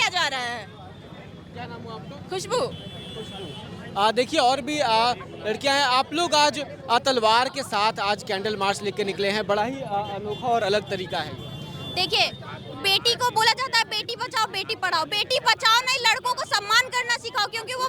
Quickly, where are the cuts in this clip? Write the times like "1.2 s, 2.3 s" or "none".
none

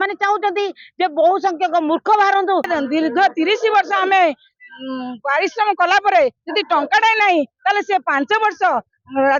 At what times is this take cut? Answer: 2.7 s

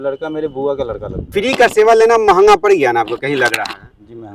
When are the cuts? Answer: 1.2 s

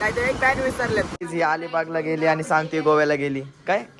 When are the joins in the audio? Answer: 1.1 s

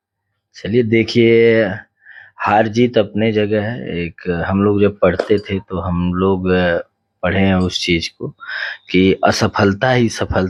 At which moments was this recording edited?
none

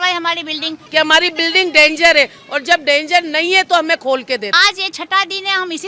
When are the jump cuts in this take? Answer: 0.8 s, 4.5 s

